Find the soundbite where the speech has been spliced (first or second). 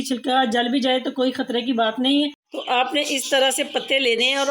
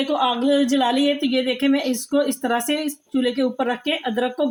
first